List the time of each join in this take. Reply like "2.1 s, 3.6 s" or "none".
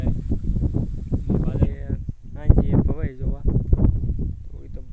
1.5 s